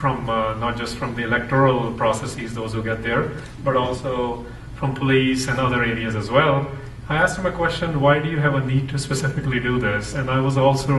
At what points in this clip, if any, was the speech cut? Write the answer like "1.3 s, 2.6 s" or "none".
1.1 s